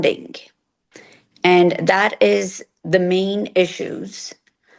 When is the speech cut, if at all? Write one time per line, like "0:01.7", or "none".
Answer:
none